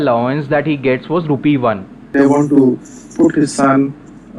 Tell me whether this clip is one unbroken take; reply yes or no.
no